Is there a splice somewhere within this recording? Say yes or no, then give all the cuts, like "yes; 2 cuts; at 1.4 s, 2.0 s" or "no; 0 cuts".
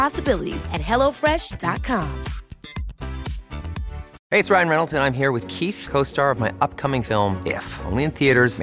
yes; 1 cut; at 4.2 s